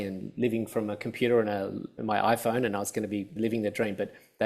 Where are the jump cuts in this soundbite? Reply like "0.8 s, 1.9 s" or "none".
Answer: 1.9 s, 3.3 s